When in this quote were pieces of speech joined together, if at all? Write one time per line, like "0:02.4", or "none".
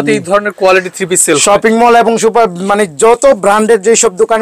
none

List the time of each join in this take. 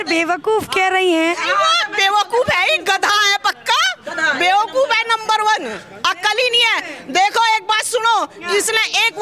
none

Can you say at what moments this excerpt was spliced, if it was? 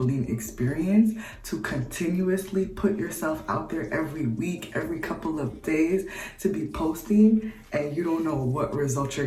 none

